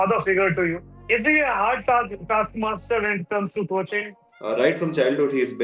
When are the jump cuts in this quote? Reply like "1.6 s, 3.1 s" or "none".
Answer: 1.0 s, 4.1 s